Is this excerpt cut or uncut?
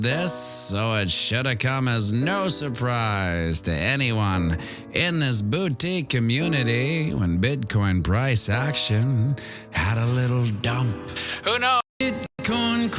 cut